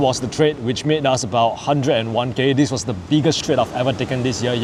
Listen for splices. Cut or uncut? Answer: uncut